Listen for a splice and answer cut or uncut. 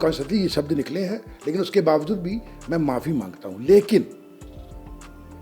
uncut